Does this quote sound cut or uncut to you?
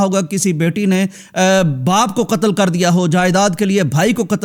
uncut